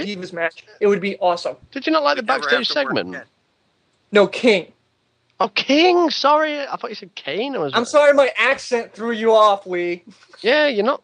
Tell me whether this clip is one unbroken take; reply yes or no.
no